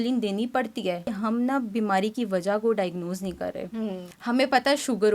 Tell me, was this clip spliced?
yes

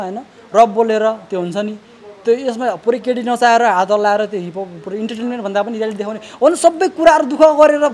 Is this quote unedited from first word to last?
yes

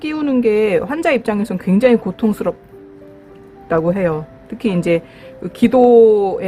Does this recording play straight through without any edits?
yes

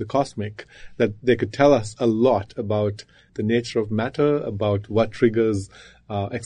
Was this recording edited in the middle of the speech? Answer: yes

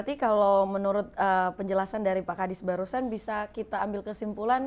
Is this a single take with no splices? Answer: yes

